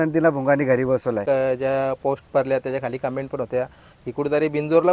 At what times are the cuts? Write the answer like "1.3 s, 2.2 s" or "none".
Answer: 1.2 s